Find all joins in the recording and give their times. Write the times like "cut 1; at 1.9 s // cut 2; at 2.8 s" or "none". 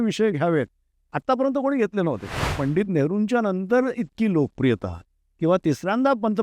cut 1; at 2.5 s